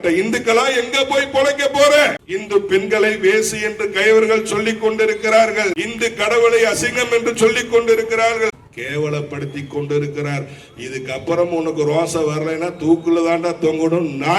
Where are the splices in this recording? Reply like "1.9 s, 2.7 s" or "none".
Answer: 2.3 s, 8.5 s